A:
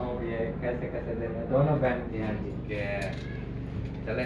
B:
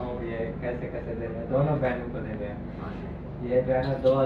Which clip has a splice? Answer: A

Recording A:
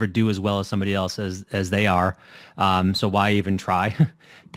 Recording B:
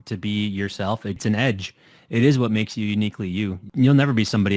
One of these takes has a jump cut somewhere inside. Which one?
B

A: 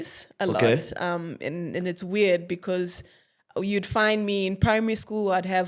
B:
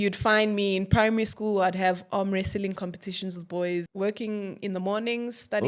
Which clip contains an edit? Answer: B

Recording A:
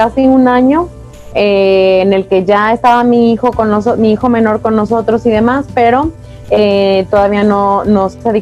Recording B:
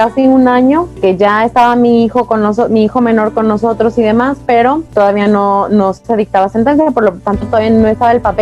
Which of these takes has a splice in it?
B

